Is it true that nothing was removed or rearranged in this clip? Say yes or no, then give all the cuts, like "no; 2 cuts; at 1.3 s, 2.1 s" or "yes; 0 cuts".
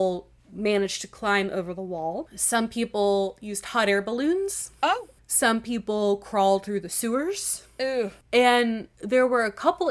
no; 4 cuts; at 2.4 s, 5.2 s, 8.2 s, 8.9 s